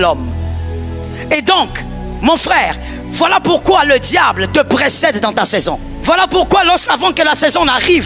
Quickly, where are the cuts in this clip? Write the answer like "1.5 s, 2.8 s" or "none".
5.9 s

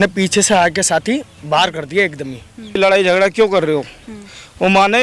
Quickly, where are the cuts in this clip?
2.8 s

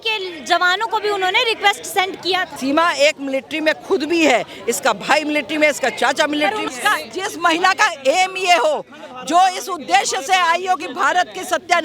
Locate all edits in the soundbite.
2.5 s, 6.6 s

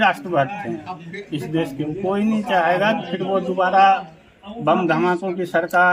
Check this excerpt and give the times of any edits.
none

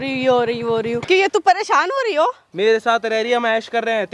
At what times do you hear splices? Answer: 1.0 s, 2.4 s

